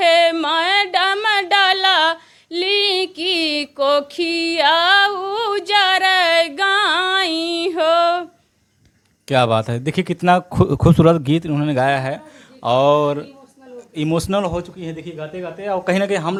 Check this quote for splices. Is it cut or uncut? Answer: uncut